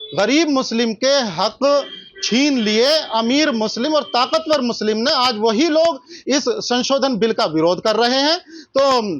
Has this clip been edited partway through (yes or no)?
no